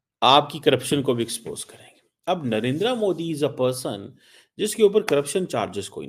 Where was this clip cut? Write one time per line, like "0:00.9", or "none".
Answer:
none